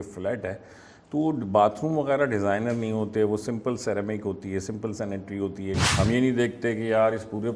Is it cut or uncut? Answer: cut